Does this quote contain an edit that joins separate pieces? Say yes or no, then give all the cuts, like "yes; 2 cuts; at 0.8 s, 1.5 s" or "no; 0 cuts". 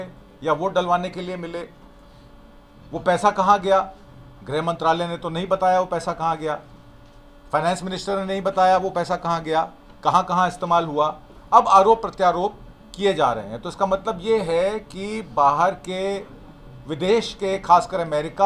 no; 0 cuts